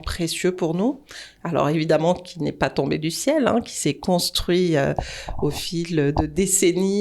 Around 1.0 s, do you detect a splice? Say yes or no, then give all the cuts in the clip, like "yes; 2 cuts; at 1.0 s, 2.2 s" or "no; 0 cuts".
no; 0 cuts